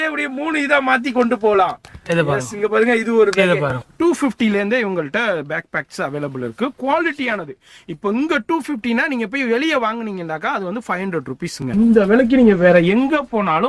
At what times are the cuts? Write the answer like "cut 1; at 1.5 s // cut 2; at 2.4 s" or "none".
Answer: cut 1; at 3.9 s // cut 2; at 11.7 s